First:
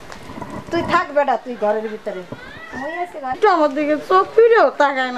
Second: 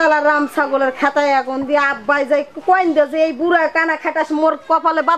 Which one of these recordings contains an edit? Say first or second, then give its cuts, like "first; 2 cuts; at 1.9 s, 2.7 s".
first; 1 cut; at 3.4 s